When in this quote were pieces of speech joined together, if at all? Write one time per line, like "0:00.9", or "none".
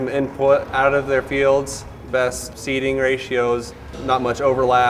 none